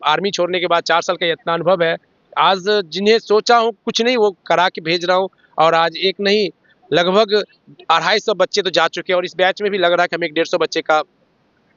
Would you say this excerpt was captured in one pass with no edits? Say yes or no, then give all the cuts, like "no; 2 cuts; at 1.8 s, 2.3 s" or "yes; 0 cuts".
yes; 0 cuts